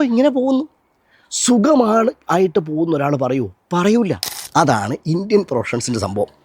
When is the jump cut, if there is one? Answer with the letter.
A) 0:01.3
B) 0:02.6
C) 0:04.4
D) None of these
C